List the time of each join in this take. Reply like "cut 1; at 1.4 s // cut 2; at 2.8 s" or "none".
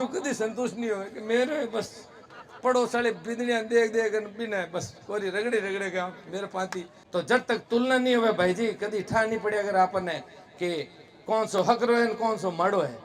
cut 1; at 7.0 s